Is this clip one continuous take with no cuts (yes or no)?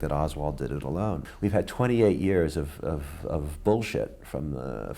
no